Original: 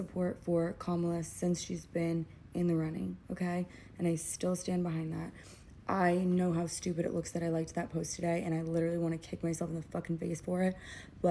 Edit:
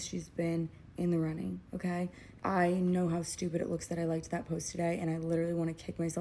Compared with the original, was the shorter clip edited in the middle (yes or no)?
yes